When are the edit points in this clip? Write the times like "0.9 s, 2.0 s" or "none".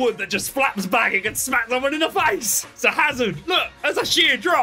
2.6 s